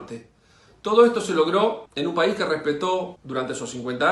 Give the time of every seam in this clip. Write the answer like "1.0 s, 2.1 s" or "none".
1.9 s, 3.2 s